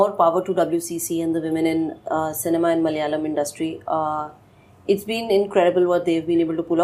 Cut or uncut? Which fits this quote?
uncut